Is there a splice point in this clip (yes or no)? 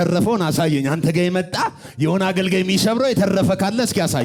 no